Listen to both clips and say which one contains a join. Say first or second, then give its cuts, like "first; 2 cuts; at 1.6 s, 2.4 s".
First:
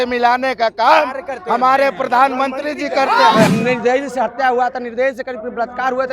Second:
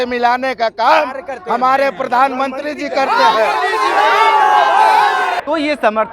first; 1 cut; at 3.5 s